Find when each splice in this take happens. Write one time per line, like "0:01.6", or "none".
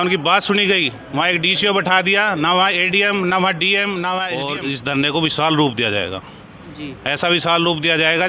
0:04.5